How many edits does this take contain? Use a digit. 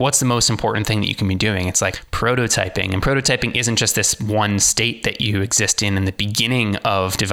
1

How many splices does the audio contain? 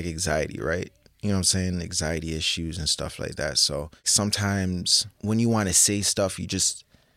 2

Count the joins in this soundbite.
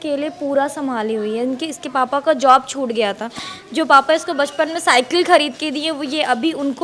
0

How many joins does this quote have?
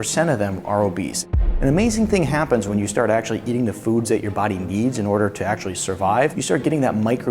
2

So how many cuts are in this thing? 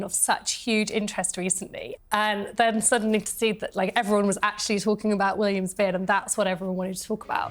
1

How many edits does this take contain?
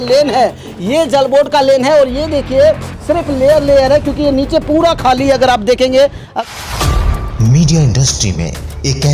1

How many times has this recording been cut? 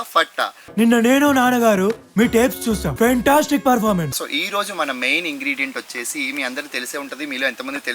2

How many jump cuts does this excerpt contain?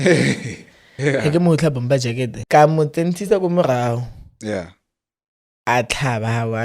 1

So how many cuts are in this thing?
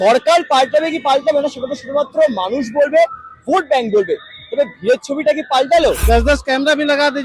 1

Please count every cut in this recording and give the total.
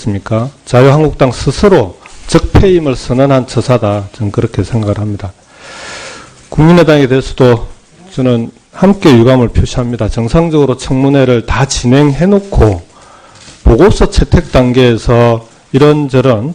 1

